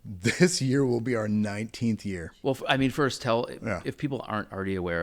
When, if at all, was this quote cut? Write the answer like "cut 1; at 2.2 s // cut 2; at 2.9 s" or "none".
cut 1; at 2.3 s